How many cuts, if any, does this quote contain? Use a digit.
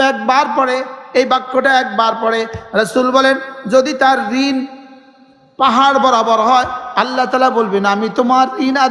0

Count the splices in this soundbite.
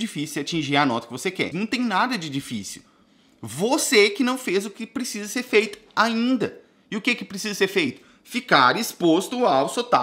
1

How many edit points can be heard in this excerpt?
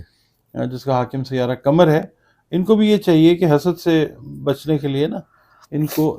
0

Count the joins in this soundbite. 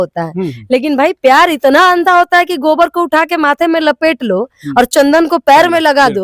0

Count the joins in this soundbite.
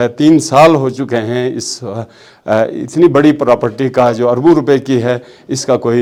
0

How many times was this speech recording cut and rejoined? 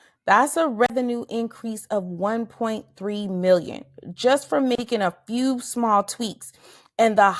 1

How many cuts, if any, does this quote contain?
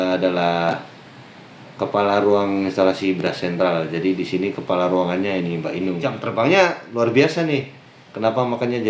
1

